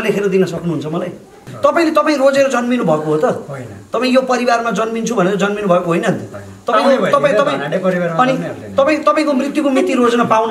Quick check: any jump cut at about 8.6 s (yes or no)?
no